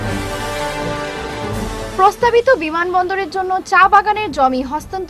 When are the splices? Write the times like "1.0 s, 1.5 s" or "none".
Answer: 1.5 s